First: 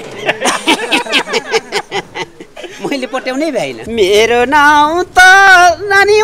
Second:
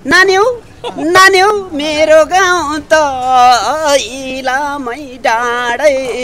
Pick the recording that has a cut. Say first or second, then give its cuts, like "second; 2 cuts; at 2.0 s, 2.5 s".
first; 1 cut; at 3.8 s